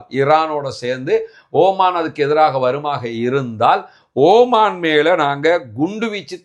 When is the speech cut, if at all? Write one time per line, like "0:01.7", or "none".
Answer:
none